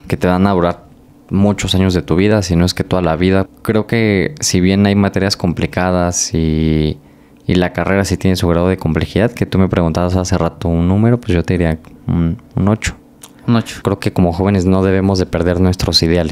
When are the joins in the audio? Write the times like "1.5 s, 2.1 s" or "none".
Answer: 3.5 s, 13.8 s